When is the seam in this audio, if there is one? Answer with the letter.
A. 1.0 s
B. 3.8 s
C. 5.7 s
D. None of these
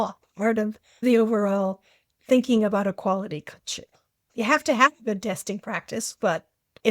A